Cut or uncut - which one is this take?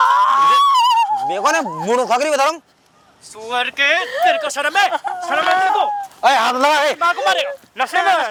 uncut